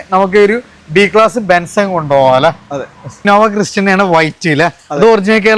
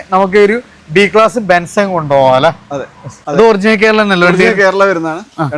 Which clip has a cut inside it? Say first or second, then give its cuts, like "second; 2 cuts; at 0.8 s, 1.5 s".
second; 1 cut; at 3.1 s